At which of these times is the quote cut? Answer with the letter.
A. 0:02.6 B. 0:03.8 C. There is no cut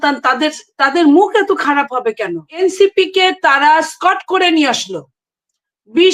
A